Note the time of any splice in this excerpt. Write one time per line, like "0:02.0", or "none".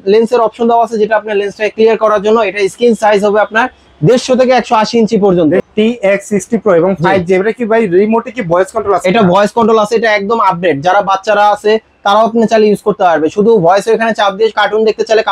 0:05.6